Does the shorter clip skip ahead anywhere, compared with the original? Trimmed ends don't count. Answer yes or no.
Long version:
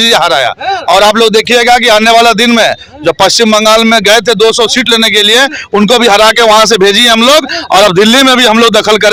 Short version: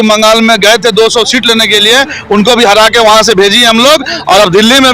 no